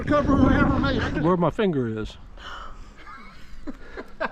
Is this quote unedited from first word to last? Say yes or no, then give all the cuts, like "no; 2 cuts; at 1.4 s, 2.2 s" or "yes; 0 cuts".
no; 1 cut; at 1.0 s